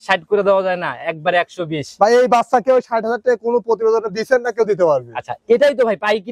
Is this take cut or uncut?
uncut